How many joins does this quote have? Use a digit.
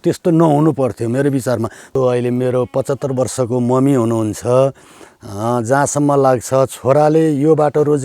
1